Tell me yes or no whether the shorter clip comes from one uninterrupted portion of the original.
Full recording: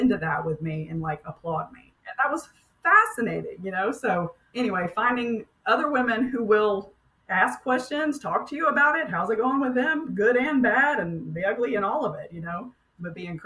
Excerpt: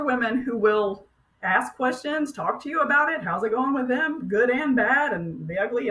yes